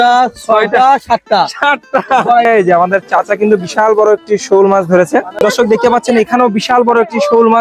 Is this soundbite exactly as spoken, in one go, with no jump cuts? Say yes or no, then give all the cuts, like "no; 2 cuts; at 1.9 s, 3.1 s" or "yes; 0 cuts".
no; 2 cuts; at 2.5 s, 5.4 s